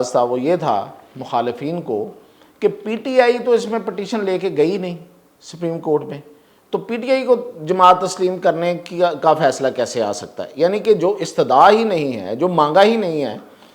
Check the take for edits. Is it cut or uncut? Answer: uncut